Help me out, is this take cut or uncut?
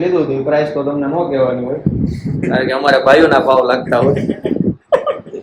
uncut